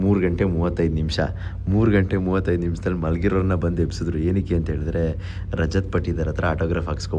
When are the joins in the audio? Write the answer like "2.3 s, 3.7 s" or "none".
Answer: none

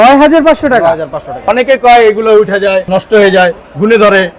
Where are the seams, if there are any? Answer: 1.4 s, 2.9 s

